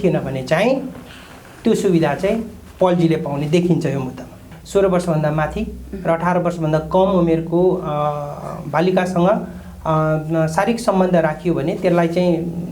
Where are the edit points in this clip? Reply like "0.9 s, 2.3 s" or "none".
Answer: 4.5 s